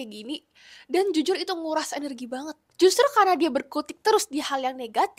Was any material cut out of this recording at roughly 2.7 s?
yes; 1 cut; at 2.7 s

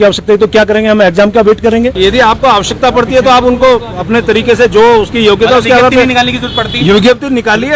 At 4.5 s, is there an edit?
no; 1 cut; at 1.9 s

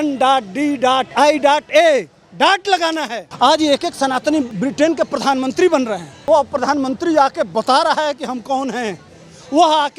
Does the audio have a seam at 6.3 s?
yes; 4 cuts; at 1.1 s, 3.2 s, 4.6 s, 6.3 s

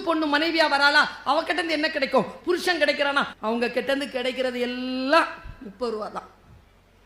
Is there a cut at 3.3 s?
yes; 1 cut; at 3.3 s

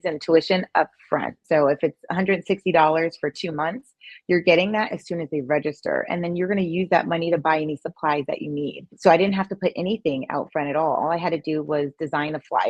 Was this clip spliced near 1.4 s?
yes; 2 cuts; at 1.4 s, 9.0 s

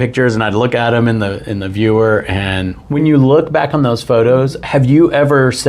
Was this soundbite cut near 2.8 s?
yes; 1 cut; at 2.8 s

